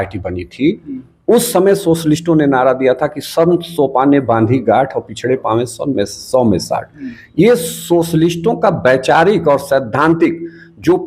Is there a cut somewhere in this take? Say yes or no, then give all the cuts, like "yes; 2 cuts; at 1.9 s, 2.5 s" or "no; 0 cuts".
no; 0 cuts